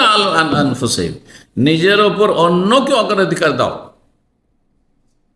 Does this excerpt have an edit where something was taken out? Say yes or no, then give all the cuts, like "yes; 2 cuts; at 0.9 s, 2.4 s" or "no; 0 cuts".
no; 0 cuts